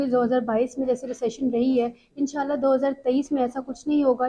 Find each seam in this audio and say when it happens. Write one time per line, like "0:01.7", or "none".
none